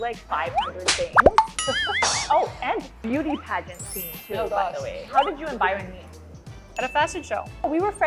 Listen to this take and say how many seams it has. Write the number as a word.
one